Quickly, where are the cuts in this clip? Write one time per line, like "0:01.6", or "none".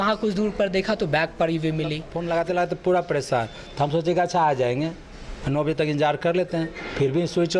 0:02.1